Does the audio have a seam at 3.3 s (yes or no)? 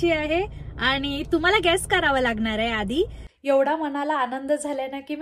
yes